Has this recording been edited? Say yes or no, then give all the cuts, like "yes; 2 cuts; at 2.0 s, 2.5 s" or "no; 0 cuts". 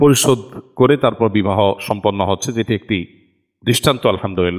no; 0 cuts